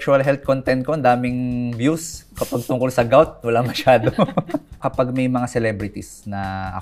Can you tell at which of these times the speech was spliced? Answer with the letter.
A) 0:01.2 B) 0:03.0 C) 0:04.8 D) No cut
C